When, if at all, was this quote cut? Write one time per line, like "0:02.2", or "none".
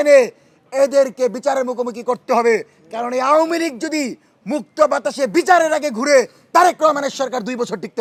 none